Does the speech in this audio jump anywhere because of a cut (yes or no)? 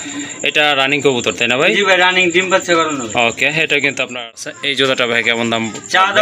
yes